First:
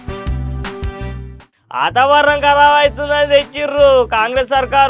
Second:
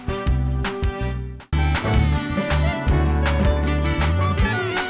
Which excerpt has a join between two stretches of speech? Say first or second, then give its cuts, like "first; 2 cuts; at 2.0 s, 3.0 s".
first; 1 cut; at 0.9 s